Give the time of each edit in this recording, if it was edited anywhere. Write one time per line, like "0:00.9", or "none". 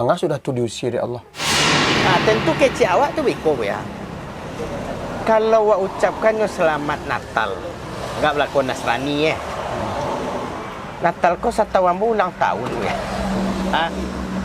0:01.7